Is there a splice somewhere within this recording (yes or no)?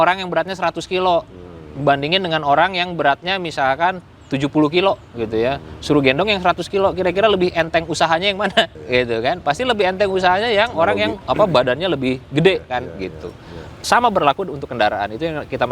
yes